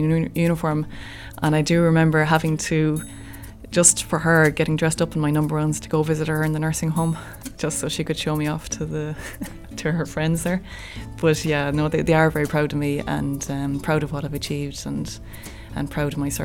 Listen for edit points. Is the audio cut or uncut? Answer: uncut